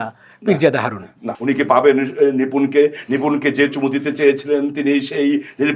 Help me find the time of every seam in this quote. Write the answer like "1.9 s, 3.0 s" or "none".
1.3 s